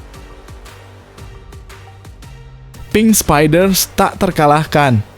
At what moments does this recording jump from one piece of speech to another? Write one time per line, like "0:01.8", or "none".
0:02.9